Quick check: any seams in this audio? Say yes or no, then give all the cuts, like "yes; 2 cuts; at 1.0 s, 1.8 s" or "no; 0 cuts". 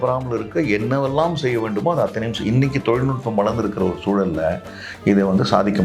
no; 0 cuts